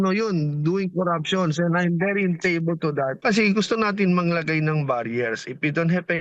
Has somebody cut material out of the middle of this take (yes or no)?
yes